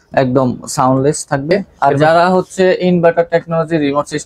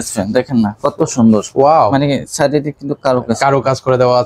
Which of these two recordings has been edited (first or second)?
first